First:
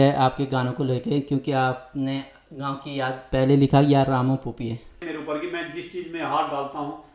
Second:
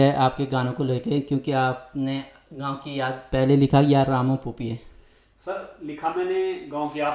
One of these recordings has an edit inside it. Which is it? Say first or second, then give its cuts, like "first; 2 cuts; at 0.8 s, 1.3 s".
first; 1 cut; at 5.0 s